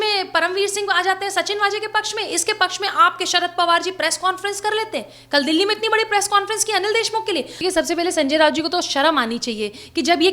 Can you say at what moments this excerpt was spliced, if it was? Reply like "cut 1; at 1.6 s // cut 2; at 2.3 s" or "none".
cut 1; at 7.5 s